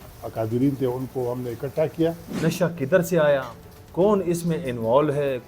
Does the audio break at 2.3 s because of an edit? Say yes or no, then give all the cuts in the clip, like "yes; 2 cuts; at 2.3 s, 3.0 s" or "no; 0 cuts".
yes; 1 cut; at 2.3 s